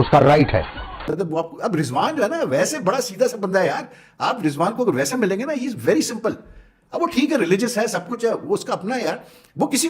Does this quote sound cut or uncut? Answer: cut